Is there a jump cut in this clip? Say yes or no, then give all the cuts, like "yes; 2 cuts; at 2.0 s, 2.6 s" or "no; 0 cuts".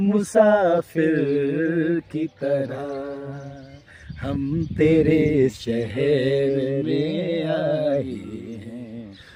no; 0 cuts